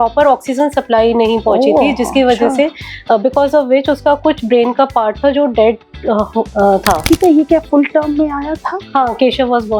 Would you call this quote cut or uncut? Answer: cut